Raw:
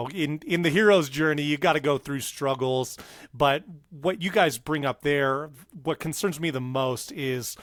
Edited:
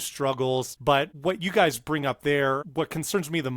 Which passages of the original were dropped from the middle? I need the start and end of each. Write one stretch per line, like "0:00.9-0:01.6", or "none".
0:03.2-0:03.8
0:05.5-0:05.8